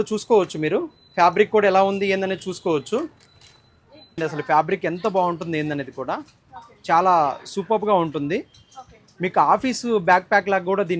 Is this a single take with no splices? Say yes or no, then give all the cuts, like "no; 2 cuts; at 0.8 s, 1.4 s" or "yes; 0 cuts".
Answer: no; 1 cut; at 4.2 s